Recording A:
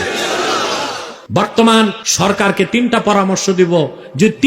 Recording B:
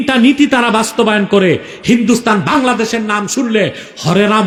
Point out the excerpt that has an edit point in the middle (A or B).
A